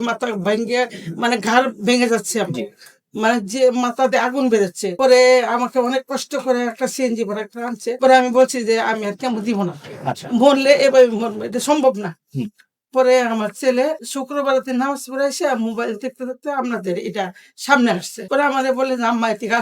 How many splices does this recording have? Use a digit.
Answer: 0